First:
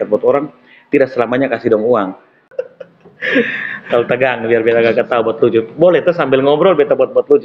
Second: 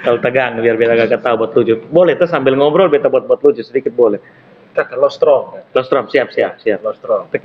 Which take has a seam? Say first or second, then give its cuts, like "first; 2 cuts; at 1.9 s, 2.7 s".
first; 1 cut; at 2.6 s